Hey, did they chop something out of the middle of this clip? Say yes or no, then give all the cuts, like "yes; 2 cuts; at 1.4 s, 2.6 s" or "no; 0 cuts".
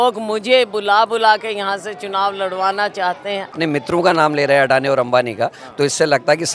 yes; 1 cut; at 3.5 s